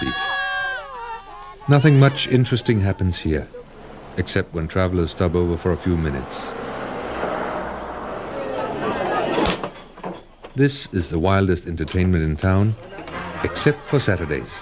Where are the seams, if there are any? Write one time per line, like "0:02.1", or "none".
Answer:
0:04.6